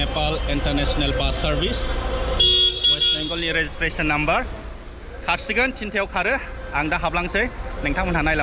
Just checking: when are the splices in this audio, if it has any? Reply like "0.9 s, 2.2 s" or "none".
none